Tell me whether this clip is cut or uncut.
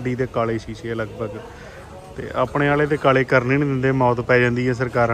uncut